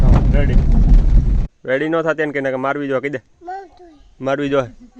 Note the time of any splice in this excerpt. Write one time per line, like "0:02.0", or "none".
0:01.4